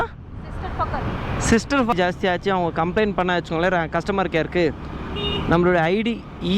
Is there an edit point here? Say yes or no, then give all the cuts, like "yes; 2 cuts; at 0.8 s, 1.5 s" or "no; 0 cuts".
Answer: yes; 1 cut; at 1.9 s